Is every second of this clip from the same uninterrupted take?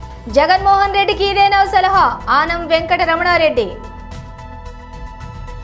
no; 1 cut; at 3.9 s

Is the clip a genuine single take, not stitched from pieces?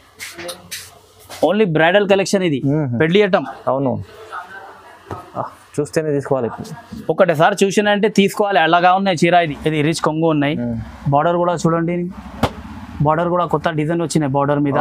no; 1 cut; at 9.5 s

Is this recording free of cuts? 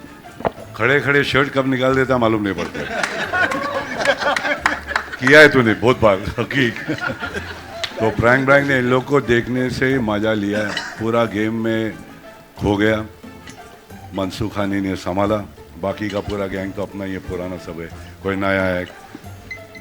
yes; 0 cuts

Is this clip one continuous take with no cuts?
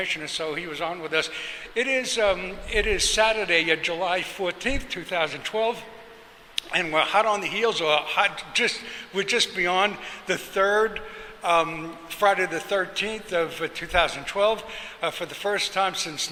yes; 0 cuts

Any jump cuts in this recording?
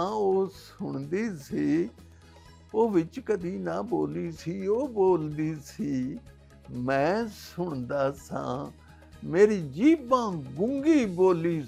no; 0 cuts

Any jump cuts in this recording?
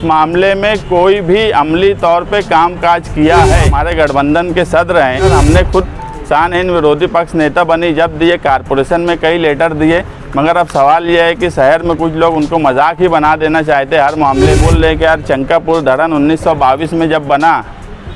yes; 3 cuts; at 3.8 s, 5.3 s, 14.6 s

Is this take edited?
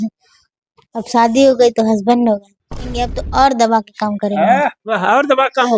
yes; 1 cut; at 3.1 s

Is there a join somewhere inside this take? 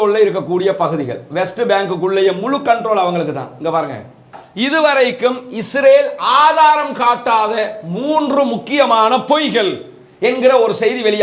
yes; 1 cut; at 4.4 s

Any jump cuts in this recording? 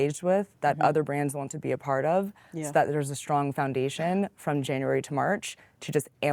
no; 0 cuts

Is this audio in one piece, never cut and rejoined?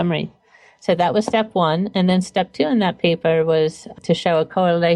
no; 1 cut; at 3.9 s

